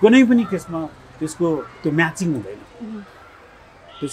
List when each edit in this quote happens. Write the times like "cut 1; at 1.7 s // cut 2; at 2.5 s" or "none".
none